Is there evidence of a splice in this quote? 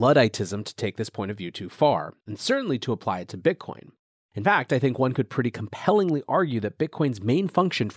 no; 0 cuts

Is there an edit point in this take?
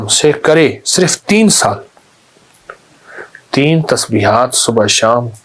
no; 0 cuts

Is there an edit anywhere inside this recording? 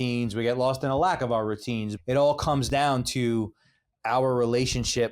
yes; 1 cut; at 1.9 s

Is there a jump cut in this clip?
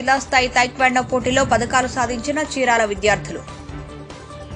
no; 0 cuts

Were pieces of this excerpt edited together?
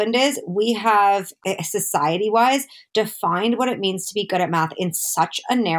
yes; 1 cut; at 1.3 s

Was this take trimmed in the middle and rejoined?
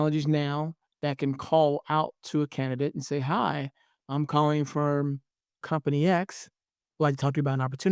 yes; 1 cut; at 6.8 s

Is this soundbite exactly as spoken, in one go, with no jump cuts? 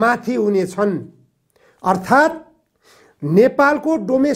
yes; 0 cuts

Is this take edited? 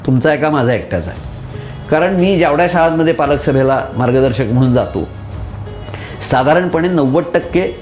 no; 0 cuts

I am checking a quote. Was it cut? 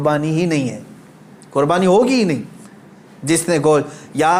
no; 0 cuts

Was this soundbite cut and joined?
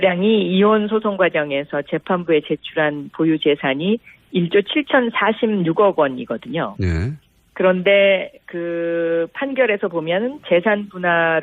yes; 1 cut; at 10.5 s

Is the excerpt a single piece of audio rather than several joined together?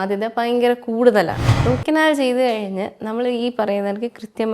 no; 1 cut; at 1.5 s

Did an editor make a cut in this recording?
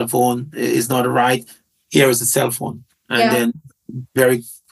no; 0 cuts

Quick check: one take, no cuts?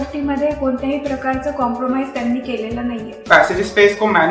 no; 1 cut; at 3.2 s

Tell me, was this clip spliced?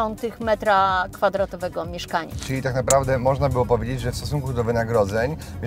yes; 1 cut; at 2.4 s

